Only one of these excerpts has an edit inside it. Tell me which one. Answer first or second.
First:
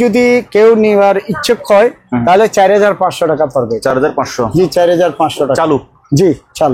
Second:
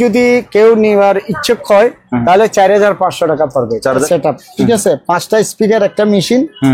second